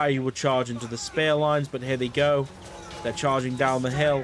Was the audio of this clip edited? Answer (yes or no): no